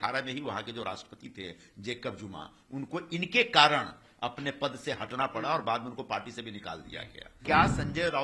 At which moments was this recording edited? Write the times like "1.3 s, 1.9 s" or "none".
7.3 s

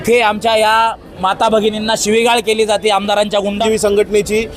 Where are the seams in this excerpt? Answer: 3.6 s

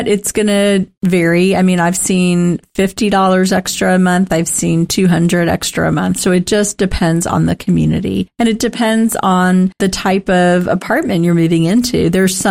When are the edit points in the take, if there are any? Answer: 0.9 s, 9.8 s

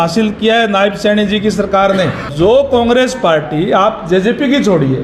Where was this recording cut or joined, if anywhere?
2.2 s

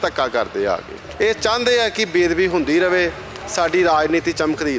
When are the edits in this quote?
1.0 s

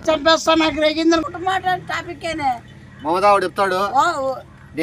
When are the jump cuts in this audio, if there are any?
1.2 s

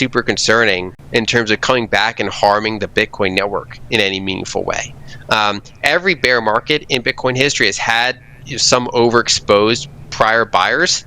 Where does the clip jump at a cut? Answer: 0.9 s

